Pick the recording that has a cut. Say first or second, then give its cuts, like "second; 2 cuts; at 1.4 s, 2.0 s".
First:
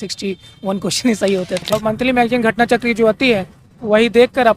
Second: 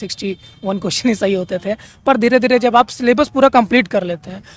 first; 1 cut; at 1.7 s